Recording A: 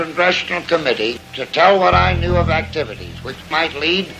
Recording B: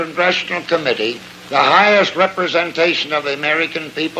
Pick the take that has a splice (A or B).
A